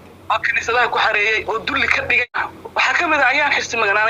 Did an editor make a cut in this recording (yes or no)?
yes